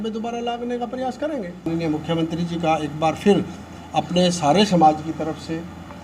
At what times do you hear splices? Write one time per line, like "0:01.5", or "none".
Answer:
0:01.6